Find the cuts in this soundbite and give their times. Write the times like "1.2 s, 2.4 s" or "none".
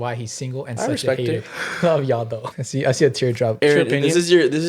2.4 s, 3.6 s